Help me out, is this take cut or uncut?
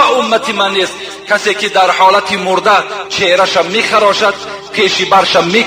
uncut